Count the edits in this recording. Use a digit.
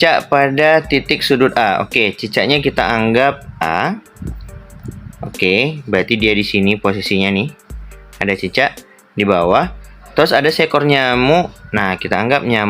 1